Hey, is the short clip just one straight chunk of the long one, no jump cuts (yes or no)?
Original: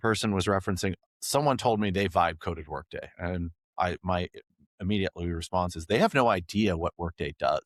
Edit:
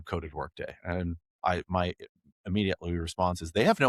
yes